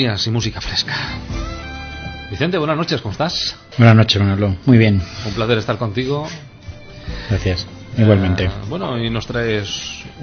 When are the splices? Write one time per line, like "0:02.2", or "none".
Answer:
0:02.4